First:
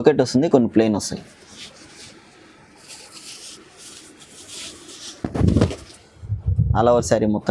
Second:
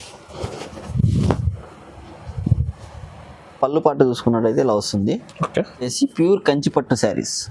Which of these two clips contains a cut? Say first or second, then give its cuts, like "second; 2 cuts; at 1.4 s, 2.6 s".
second; 1 cut; at 5.9 s